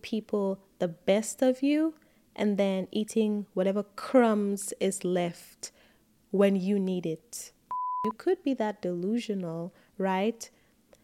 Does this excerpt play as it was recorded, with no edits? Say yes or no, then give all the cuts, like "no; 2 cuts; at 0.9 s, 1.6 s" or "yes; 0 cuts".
no; 1 cut; at 7.9 s